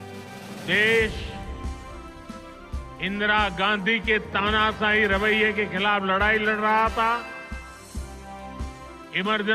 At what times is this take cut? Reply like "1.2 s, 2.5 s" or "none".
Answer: 0.7 s, 1.1 s, 3.0 s, 7.2 s, 8.8 s